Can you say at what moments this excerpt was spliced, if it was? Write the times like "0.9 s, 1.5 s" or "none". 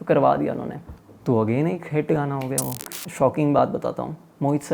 2.8 s

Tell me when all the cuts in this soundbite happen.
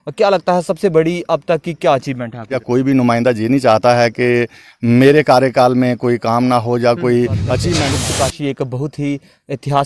2.6 s, 7.9 s

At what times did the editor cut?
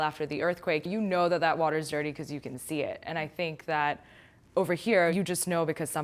0.9 s, 5.1 s

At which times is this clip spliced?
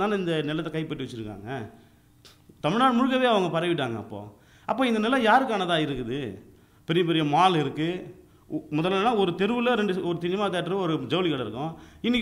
none

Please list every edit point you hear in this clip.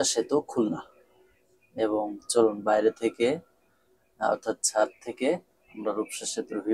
none

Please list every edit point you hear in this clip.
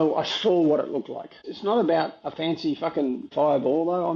1.5 s, 3.3 s

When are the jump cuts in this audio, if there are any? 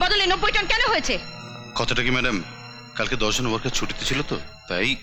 none

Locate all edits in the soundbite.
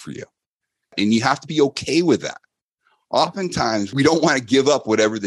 0.9 s, 3.9 s

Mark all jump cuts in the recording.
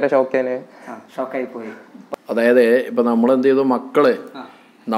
2.0 s

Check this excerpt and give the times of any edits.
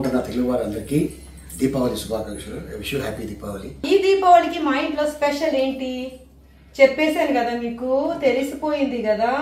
3.8 s

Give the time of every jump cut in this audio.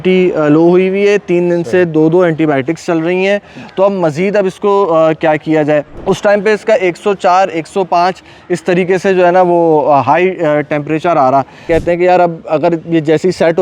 5.9 s, 11.7 s

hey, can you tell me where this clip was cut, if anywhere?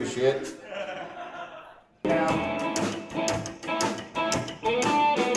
2.1 s

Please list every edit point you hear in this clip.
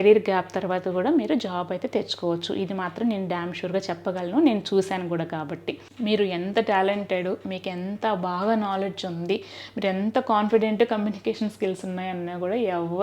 6.0 s

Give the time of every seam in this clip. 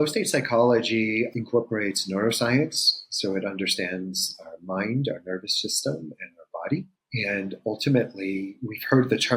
1.4 s, 7.0 s

